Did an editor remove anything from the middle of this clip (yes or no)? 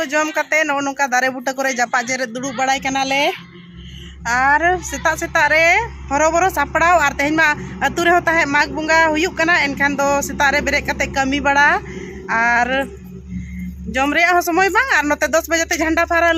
no